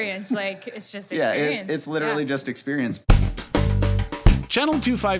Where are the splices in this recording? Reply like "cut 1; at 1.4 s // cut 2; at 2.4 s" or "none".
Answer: cut 1; at 3.0 s